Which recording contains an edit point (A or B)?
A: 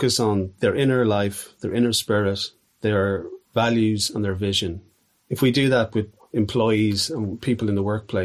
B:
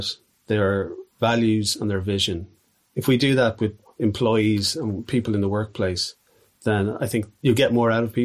B